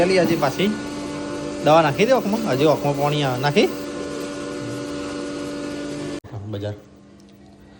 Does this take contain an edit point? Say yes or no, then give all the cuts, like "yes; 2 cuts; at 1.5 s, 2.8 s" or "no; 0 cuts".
no; 0 cuts